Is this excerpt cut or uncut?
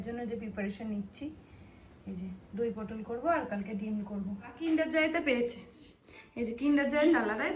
cut